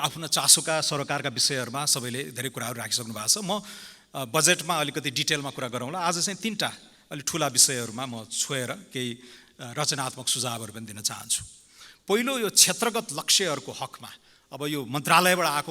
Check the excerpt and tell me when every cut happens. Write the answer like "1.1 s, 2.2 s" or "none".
none